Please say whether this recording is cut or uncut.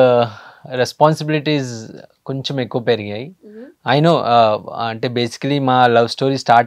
uncut